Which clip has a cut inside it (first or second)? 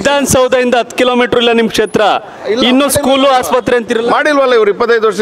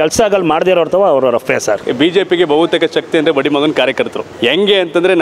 second